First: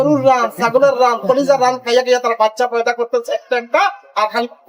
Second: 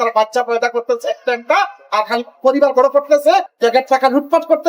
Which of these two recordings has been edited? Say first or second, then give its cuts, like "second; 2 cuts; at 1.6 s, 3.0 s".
second; 1 cut; at 3.5 s